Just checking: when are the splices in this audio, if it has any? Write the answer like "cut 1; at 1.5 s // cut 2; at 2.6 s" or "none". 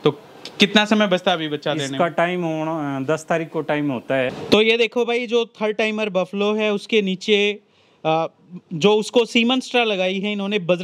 cut 1; at 4.4 s